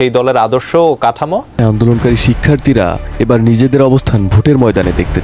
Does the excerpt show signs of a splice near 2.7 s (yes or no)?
no